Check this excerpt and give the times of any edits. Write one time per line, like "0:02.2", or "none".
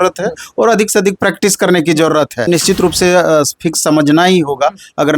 0:02.5